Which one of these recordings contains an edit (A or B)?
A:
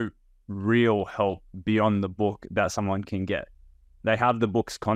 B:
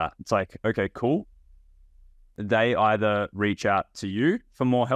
B